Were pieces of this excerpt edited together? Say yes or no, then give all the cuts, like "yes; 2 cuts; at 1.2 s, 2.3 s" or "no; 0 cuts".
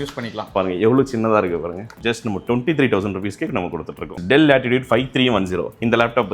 yes; 2 cuts; at 2.0 s, 4.2 s